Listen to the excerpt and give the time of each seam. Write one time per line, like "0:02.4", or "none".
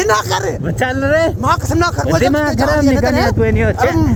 none